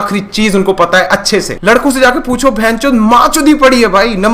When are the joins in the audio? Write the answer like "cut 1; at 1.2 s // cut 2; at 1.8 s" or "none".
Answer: cut 1; at 1.5 s